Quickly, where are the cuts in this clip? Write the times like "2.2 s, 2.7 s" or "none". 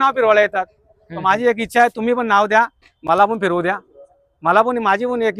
none